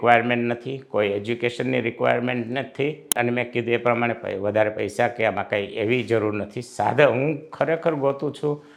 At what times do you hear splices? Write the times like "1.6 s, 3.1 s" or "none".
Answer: none